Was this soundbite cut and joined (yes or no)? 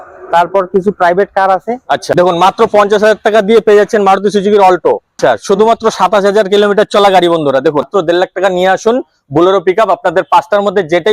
yes